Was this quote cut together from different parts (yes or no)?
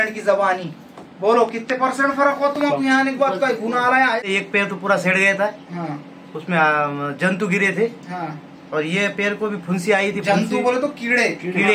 yes